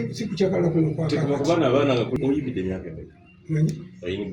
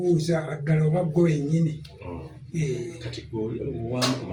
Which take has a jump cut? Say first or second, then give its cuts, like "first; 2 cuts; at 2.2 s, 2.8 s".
first; 1 cut; at 2.1 s